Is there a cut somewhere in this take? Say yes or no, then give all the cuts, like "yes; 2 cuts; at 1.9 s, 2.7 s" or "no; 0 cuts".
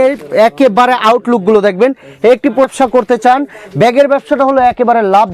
yes; 1 cut; at 2.7 s